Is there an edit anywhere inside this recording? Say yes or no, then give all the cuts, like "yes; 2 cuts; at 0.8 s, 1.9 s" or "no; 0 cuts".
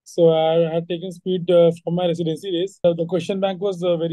yes; 1 cut; at 2.8 s